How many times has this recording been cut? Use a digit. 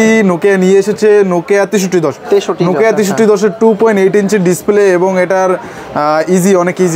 0